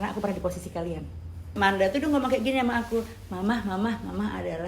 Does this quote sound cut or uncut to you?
cut